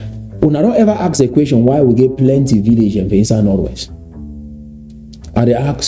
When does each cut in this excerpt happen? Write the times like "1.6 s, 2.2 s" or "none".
3.7 s, 5.1 s

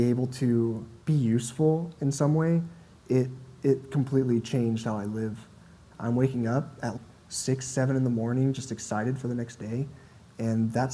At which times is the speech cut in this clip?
0.9 s, 5.8 s

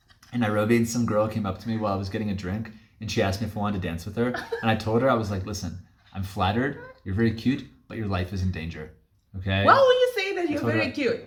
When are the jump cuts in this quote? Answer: none

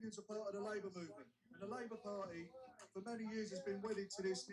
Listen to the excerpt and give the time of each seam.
none

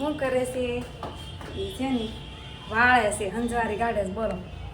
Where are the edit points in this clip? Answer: none

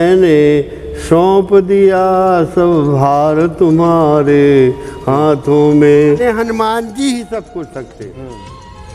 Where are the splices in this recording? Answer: 6.2 s

